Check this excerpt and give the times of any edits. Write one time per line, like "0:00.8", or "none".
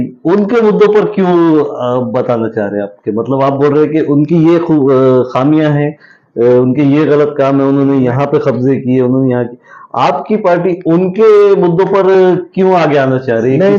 none